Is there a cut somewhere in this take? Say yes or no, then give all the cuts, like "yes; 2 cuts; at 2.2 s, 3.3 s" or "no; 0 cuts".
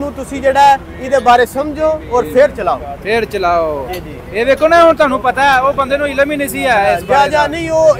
no; 0 cuts